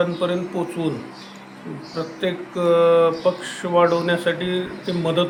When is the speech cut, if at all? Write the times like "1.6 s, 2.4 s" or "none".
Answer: none